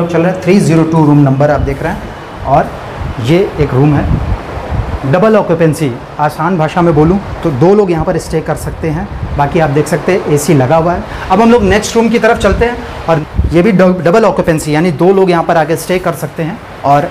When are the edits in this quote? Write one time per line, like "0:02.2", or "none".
0:11.1
0:13.2